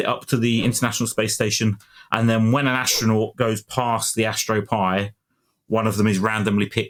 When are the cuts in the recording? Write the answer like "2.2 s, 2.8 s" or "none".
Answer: none